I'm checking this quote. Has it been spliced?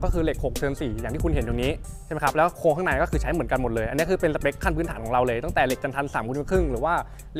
no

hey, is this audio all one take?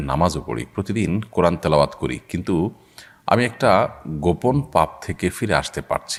yes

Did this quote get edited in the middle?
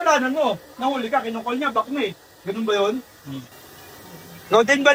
no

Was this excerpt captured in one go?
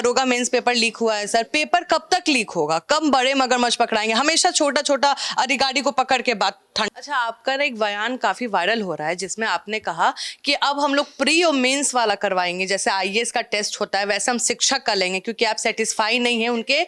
no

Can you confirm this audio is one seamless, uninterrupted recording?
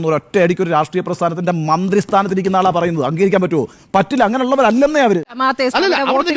no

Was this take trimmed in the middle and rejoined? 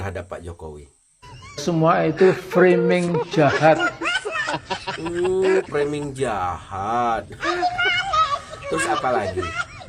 no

